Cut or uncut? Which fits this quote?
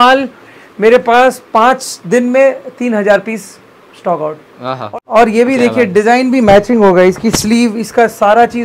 cut